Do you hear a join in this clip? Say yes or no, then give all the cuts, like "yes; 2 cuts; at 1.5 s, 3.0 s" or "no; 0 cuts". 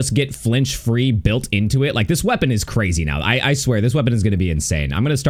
no; 0 cuts